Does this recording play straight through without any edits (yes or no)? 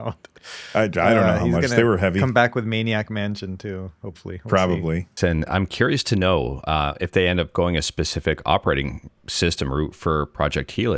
no